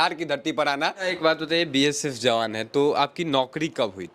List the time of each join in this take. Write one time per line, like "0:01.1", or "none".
0:01.1

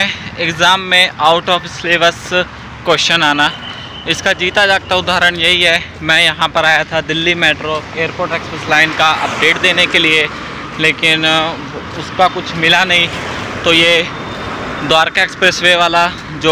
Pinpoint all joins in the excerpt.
none

